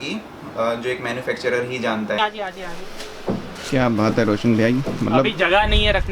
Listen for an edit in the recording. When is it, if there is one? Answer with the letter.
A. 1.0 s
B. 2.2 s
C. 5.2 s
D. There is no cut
B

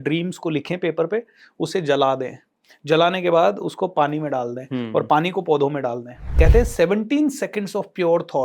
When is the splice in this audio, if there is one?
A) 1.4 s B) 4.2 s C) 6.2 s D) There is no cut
C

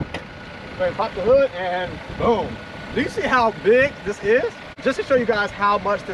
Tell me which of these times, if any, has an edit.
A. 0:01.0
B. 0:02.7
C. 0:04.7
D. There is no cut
C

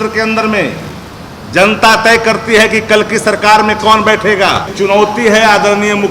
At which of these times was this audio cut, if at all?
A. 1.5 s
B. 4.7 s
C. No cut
B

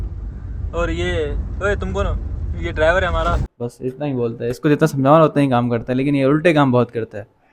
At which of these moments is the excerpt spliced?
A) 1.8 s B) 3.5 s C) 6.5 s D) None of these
B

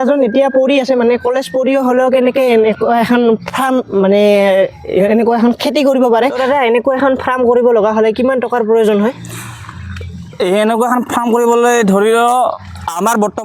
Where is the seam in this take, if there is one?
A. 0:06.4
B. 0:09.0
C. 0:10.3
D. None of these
A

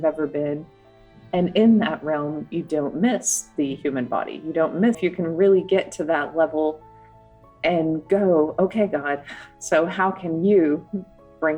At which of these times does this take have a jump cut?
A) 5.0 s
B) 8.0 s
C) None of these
A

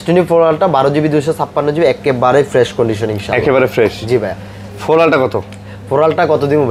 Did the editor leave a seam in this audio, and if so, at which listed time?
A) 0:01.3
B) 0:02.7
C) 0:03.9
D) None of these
D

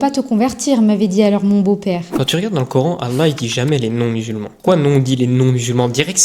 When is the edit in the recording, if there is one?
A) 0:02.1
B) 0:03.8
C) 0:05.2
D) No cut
A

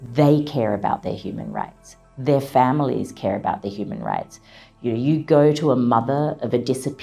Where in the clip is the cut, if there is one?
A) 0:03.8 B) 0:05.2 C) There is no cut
C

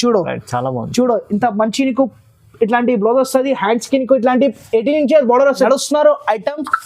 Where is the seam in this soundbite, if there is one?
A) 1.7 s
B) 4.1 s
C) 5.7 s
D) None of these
C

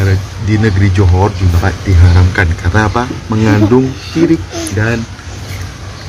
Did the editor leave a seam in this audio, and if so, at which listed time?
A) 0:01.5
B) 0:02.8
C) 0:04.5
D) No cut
A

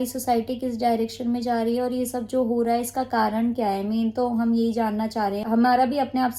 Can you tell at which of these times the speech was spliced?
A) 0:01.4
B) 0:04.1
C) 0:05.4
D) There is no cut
C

